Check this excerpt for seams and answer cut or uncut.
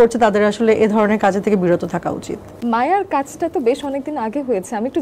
uncut